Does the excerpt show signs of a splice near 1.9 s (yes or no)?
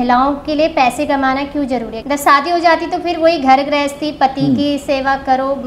yes